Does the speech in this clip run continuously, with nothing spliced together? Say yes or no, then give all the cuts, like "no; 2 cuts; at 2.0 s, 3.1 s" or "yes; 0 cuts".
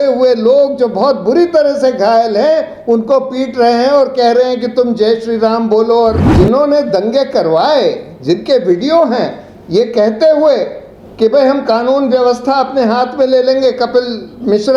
no; 1 cut; at 6.3 s